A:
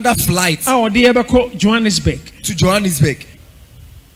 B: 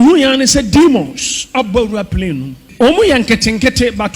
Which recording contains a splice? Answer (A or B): B